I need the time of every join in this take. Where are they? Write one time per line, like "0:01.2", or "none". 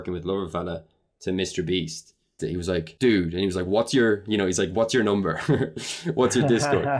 0:02.4